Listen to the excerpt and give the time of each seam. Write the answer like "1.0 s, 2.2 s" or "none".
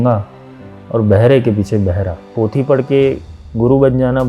2.2 s

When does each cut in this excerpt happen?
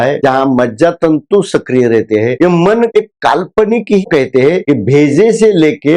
4.0 s

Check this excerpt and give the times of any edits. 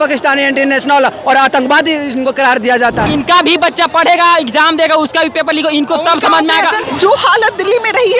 3.1 s, 6.8 s

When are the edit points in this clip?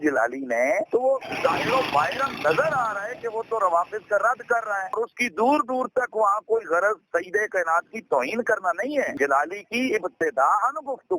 1.3 s, 4.9 s, 9.1 s

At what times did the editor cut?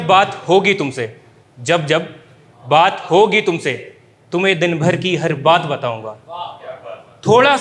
none

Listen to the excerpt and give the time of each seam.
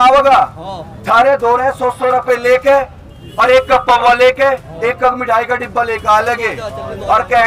none

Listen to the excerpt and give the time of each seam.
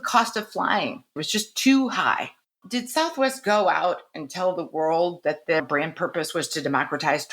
1.2 s, 2.6 s

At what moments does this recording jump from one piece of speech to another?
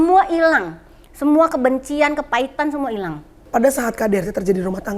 3.4 s

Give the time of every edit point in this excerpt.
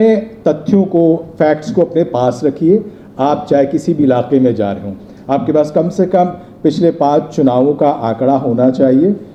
none

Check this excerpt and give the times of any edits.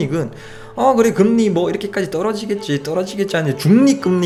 none

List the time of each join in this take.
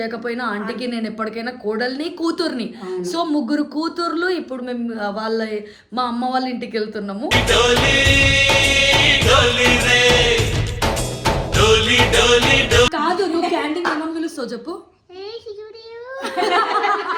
12.9 s

